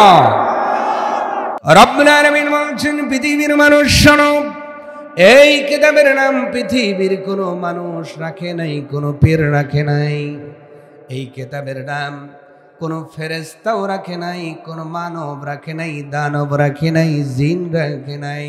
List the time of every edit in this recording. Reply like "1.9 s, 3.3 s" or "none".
1.5 s

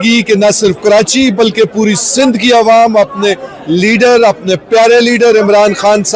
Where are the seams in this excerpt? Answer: none

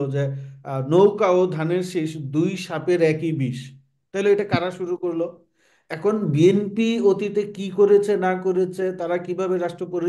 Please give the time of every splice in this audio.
none

